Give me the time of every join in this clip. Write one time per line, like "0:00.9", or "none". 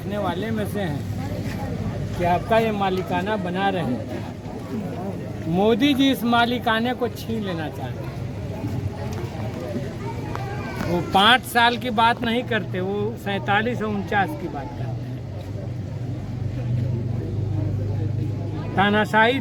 none